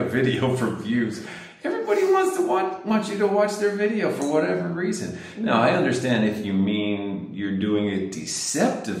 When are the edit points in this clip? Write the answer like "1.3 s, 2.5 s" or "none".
none